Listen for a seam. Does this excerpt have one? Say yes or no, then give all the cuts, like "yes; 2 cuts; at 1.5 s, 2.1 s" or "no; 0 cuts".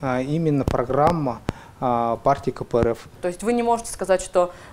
yes; 1 cut; at 3.1 s